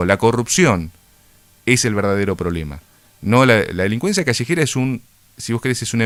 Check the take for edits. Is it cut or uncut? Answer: uncut